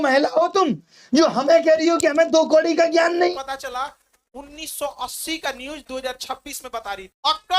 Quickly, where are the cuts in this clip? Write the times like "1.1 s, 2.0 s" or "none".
3.3 s